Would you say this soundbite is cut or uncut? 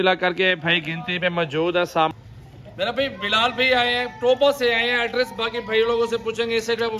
cut